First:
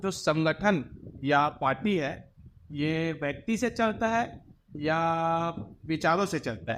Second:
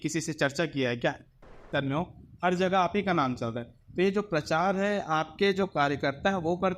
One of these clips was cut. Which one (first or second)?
second